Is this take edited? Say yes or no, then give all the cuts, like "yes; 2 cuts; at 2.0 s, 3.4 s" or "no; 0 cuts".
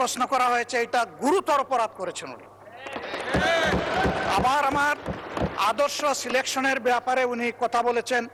no; 0 cuts